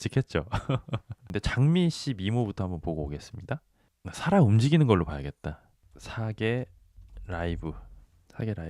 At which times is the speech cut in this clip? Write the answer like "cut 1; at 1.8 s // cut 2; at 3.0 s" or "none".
cut 1; at 1.3 s